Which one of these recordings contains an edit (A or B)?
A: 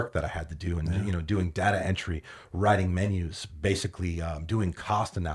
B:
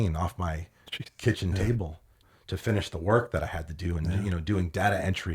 B